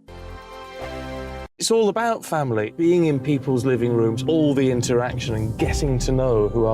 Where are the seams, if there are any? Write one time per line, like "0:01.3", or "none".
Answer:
0:01.5